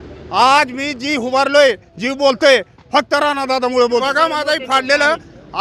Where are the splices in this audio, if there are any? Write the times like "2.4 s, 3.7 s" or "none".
4.0 s